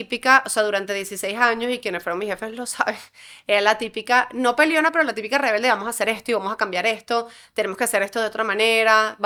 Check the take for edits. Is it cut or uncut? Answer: uncut